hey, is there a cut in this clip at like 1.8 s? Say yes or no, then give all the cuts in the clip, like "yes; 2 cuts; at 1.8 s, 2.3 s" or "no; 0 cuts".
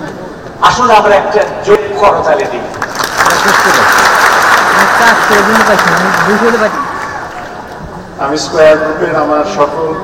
yes; 1 cut; at 1.8 s